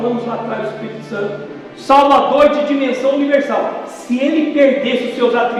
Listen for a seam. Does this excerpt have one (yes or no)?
no